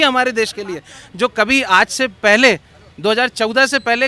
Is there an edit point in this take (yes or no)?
no